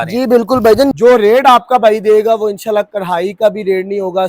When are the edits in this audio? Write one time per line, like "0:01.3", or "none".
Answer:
0:00.9